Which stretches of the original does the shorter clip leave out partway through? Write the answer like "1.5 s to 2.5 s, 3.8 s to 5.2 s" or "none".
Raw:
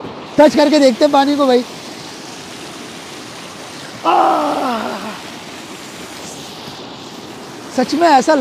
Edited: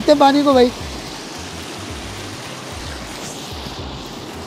4.0 s to 6.1 s